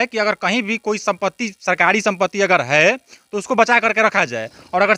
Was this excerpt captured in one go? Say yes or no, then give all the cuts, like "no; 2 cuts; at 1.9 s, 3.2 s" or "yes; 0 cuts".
yes; 0 cuts